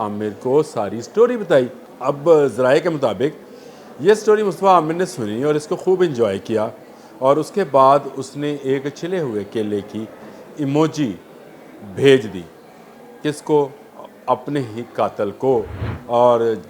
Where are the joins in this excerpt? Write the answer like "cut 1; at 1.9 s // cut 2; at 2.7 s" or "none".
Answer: cut 1; at 1.8 s